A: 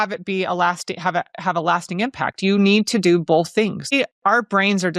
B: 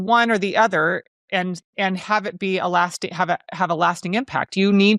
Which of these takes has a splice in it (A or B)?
A